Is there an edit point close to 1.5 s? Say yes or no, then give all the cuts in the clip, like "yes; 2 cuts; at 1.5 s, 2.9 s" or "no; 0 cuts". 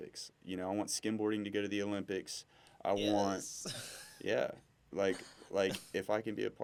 no; 0 cuts